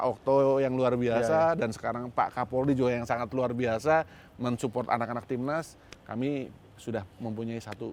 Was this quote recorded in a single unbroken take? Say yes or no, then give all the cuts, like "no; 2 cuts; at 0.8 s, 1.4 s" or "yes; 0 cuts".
yes; 0 cuts